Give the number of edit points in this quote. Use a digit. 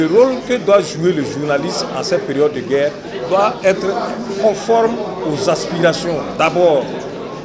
0